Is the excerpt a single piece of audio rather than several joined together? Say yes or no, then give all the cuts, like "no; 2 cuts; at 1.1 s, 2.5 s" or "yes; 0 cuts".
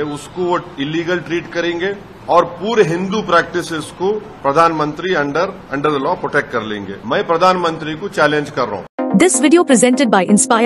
no; 5 cuts; at 2.1 s, 4.3 s, 5.6 s, 6.9 s, 8.9 s